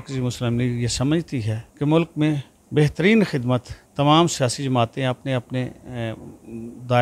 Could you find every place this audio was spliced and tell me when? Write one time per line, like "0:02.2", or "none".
0:01.6
0:02.5
0:03.8